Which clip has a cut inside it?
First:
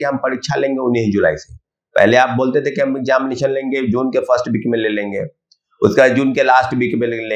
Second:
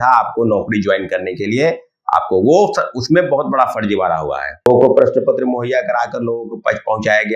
second; 1 cut; at 4.7 s

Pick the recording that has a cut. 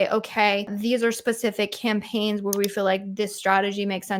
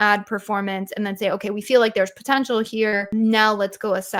second; 1 cut; at 3.1 s

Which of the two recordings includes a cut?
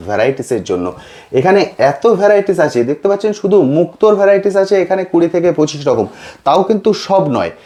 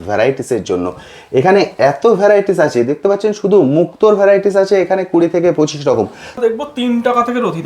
second; 1 cut; at 6.4 s

